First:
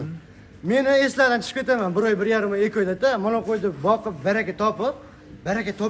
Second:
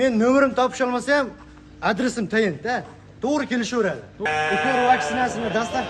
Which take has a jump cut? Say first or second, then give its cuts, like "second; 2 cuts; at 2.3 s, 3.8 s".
second; 1 cut; at 4.2 s